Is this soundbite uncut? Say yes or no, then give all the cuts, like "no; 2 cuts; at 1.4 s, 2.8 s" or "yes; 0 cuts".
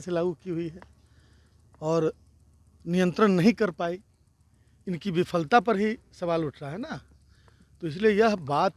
yes; 0 cuts